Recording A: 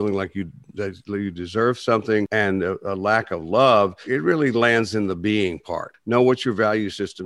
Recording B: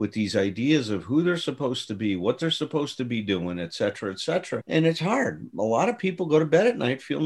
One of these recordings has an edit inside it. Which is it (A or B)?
A